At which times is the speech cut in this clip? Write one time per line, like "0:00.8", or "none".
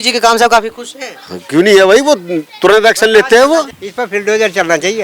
0:03.8